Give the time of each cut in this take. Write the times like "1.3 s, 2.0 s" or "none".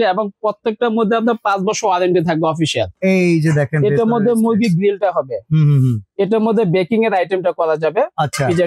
2.9 s